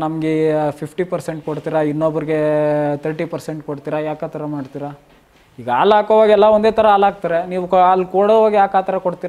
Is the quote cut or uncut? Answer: uncut